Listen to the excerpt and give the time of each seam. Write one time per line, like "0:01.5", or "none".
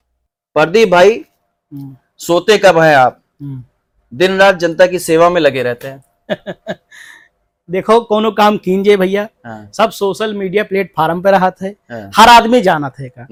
none